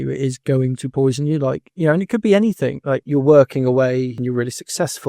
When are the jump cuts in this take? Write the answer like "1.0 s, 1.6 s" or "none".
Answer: 3.0 s, 4.1 s